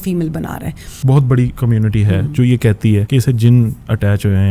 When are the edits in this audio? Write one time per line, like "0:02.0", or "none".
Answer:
0:01.0
0:01.6
0:03.1